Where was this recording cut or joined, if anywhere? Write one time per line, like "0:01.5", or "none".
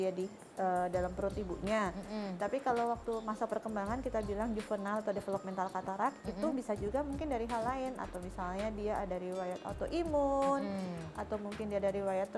none

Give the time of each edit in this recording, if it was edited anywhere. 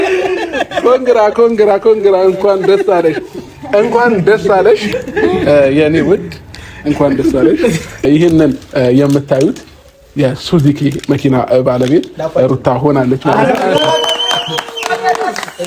0:08.1

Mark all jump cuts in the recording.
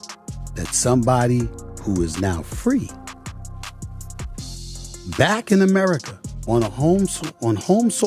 0:02.9
0:04.5

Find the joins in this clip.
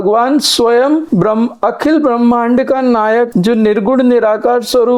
none

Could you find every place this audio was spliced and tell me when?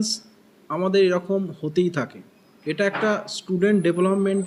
none

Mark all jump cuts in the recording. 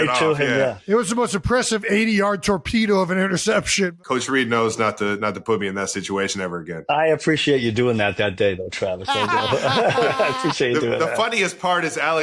0:03.9
0:06.7

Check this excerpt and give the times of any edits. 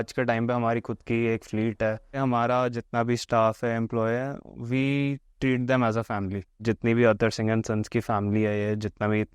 0:02.1
0:06.6

